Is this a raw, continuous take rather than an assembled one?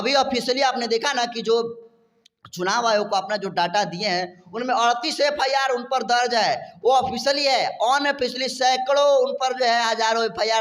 yes; 0 cuts

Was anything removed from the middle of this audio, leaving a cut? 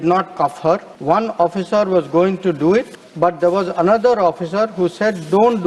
yes; 2 cuts; at 0.9 s, 3.0 s

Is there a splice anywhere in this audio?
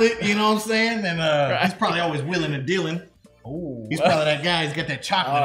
no; 0 cuts

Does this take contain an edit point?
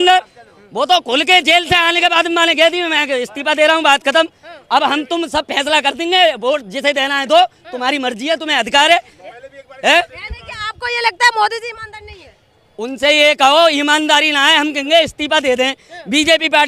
no; 0 cuts

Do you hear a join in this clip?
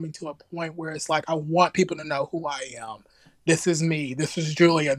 no; 0 cuts

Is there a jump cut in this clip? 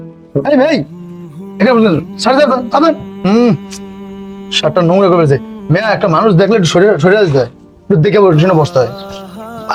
no; 0 cuts

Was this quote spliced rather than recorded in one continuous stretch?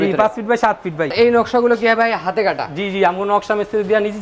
yes; 1 cut; at 1.1 s

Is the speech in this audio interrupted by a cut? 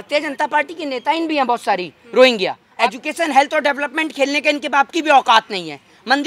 yes; 1 cut; at 2.6 s

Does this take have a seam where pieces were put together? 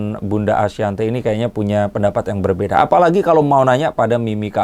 no; 0 cuts

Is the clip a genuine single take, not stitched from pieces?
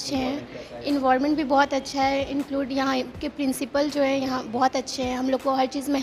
yes; 0 cuts

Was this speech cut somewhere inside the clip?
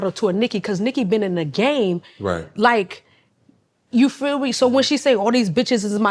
no; 0 cuts

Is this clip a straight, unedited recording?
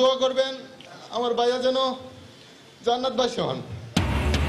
yes; 0 cuts

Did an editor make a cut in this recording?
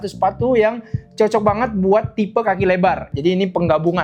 yes; 1 cut; at 3.1 s

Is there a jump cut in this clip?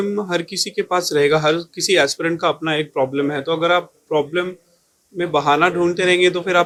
no; 0 cuts

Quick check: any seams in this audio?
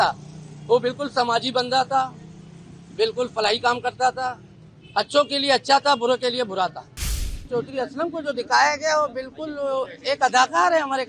yes; 1 cut; at 7.3 s

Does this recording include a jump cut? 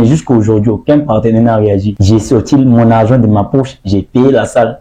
yes; 1 cut; at 1.9 s

